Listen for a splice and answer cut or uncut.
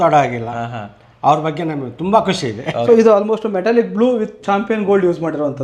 cut